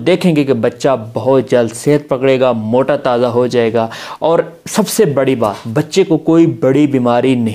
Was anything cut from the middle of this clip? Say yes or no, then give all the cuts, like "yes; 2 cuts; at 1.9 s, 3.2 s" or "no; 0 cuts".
no; 0 cuts